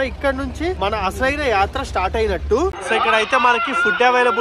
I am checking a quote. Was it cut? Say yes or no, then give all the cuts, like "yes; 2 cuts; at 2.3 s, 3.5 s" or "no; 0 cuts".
yes; 1 cut; at 2.7 s